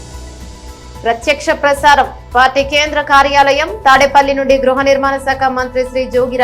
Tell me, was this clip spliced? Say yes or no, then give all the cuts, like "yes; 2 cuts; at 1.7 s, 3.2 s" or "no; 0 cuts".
yes; 1 cut; at 1.0 s